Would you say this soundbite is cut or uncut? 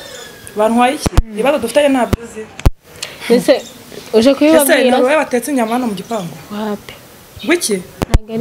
uncut